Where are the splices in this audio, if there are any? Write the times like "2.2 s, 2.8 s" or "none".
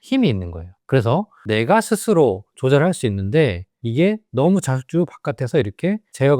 1.4 s